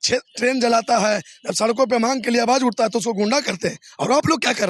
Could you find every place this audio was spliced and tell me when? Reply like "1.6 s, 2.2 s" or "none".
none

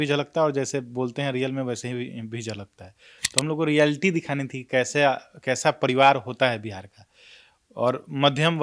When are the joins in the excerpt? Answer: none

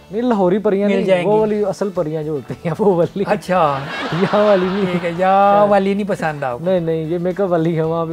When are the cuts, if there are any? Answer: none

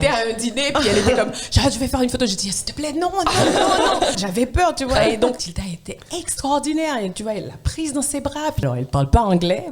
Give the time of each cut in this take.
4.2 s, 5.5 s, 8.6 s

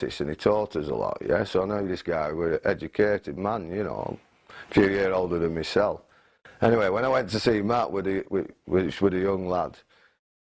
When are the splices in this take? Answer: none

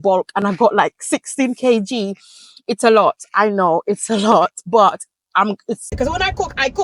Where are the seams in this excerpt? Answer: 5.9 s

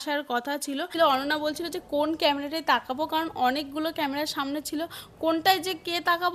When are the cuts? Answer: 0.9 s

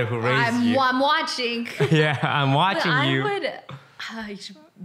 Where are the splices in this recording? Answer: none

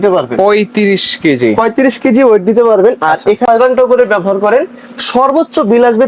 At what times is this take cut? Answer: 3.4 s

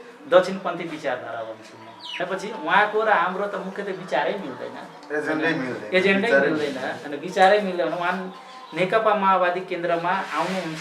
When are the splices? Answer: 2.1 s

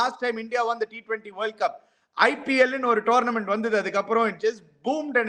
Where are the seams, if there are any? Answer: none

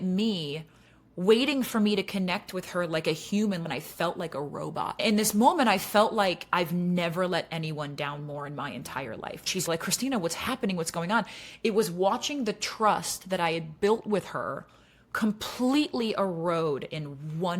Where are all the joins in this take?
3.6 s, 5.0 s, 9.7 s

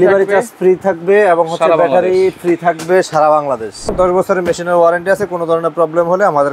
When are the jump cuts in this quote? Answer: 3.9 s

